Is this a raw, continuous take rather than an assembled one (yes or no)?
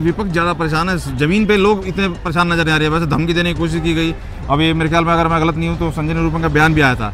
yes